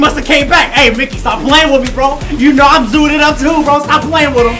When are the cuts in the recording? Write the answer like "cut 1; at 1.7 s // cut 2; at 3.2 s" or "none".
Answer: none